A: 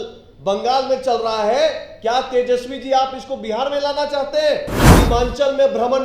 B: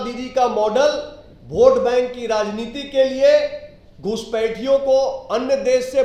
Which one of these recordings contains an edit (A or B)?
A